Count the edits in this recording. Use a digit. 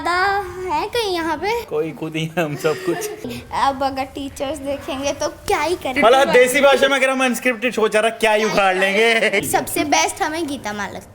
3